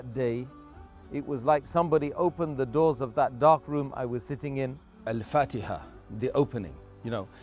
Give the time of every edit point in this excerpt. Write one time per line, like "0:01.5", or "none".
0:05.0